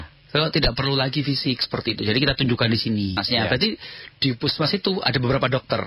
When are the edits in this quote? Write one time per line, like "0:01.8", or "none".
0:03.2